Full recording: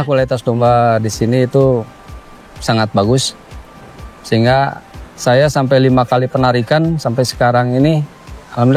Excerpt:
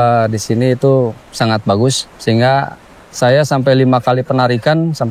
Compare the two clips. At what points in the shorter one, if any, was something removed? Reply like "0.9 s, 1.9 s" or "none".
1.2 s, 2.1 s